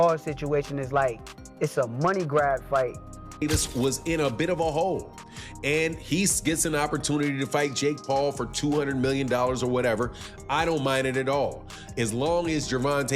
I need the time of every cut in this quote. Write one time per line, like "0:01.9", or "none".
0:03.4